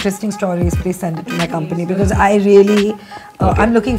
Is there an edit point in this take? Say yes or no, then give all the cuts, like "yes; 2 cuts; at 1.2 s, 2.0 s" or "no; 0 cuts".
no; 0 cuts